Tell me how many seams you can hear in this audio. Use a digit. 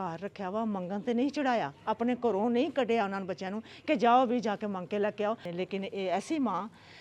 1